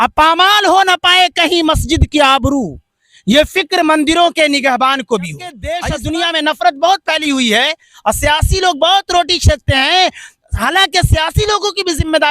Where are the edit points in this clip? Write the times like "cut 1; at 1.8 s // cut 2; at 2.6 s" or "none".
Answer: cut 1; at 5.7 s